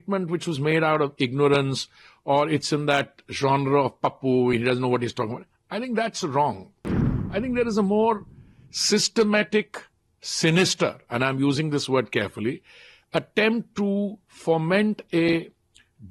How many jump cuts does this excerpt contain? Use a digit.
0